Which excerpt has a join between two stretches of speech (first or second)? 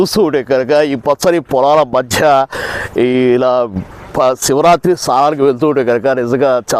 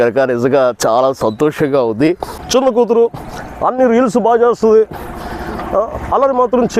second